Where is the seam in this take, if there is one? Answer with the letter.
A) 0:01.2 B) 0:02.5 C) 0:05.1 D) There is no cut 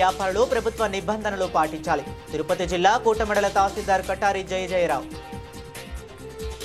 C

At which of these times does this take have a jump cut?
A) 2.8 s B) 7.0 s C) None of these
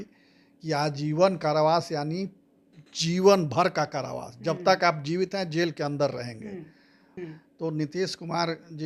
B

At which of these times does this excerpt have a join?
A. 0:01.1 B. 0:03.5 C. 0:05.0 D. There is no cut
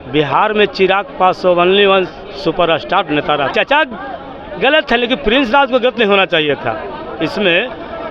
B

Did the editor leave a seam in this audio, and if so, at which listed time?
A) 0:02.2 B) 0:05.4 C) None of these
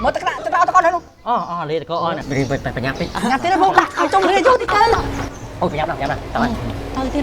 A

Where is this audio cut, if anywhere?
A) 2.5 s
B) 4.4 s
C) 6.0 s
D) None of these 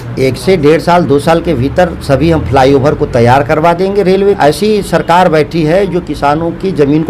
B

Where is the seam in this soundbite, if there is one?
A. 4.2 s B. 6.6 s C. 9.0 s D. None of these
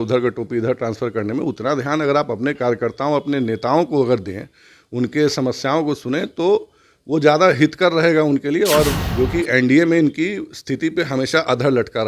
C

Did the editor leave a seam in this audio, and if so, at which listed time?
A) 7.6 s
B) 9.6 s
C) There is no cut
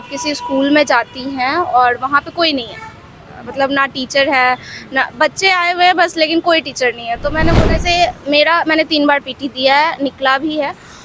A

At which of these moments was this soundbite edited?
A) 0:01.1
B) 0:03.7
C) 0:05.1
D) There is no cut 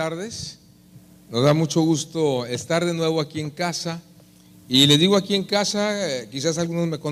D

